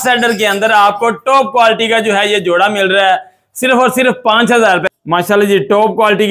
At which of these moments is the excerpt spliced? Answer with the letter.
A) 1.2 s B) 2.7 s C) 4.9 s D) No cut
C